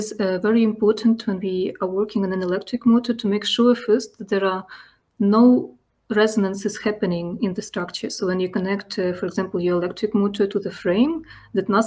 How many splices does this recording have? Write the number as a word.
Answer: zero